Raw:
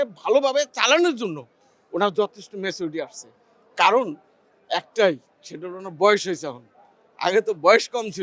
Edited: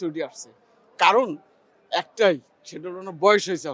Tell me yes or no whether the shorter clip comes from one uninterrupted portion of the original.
yes